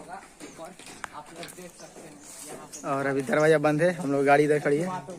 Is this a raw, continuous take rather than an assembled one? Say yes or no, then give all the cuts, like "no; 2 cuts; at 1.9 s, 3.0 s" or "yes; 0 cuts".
yes; 0 cuts